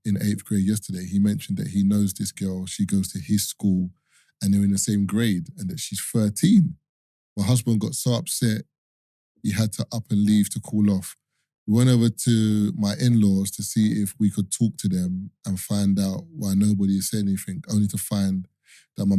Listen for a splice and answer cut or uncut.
uncut